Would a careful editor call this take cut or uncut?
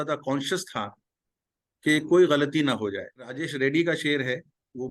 cut